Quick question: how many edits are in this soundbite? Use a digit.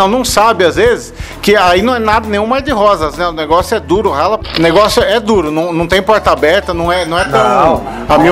1